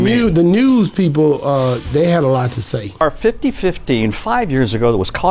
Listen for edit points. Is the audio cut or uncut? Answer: uncut